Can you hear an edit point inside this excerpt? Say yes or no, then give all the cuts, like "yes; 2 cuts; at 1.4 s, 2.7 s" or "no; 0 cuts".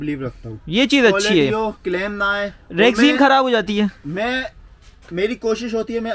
no; 0 cuts